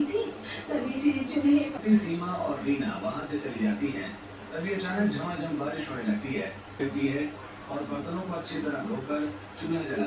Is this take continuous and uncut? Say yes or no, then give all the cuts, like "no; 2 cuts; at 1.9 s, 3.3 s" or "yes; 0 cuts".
no; 2 cuts; at 1.7 s, 6.8 s